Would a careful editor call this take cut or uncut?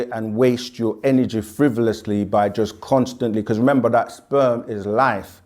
uncut